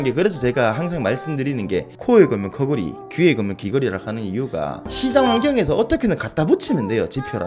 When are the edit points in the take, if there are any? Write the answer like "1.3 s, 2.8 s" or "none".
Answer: 1.9 s, 4.9 s